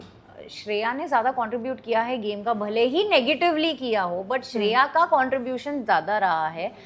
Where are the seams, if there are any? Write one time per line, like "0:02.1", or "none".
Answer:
none